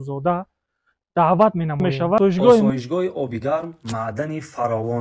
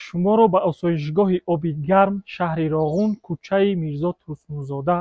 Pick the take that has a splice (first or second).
first